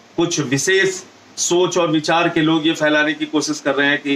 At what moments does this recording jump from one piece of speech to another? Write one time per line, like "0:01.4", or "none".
none